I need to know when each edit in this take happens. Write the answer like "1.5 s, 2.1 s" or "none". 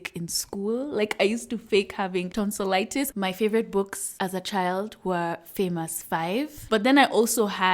2.6 s, 4.0 s, 6.7 s